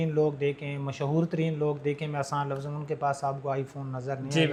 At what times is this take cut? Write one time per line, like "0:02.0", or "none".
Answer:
none